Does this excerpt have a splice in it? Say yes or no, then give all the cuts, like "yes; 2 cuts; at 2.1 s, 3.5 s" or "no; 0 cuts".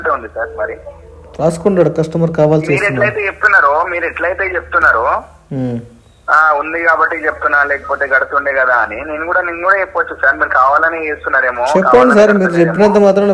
no; 0 cuts